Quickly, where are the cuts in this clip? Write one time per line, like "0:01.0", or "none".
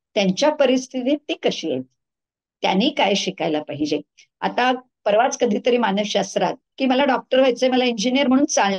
none